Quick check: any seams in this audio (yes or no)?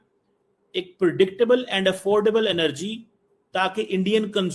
no